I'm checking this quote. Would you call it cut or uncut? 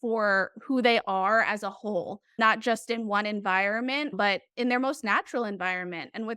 cut